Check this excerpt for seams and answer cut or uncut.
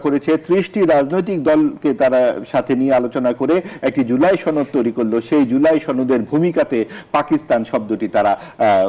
uncut